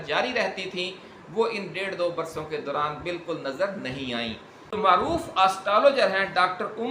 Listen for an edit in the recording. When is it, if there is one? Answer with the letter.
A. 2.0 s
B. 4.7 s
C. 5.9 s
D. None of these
B